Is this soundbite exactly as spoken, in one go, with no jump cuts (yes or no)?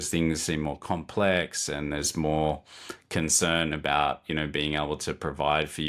yes